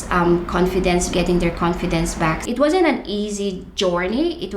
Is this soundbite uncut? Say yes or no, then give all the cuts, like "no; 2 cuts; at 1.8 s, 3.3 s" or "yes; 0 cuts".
no; 2 cuts; at 1.1 s, 2.4 s